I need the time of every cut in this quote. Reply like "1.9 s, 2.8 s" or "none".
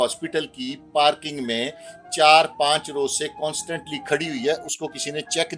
none